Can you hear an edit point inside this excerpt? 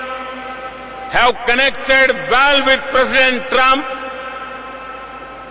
no; 0 cuts

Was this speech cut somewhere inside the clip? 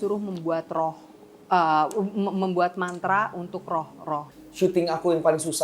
yes; 1 cut; at 4.3 s

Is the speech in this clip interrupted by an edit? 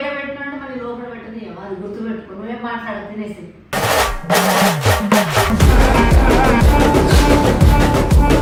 no; 0 cuts

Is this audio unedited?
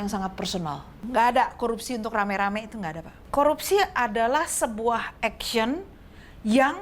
no; 2 cuts; at 0.9 s, 3.2 s

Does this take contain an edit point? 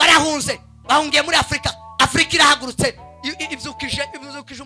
no; 0 cuts

